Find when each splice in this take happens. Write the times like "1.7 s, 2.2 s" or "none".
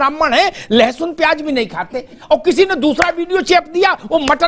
none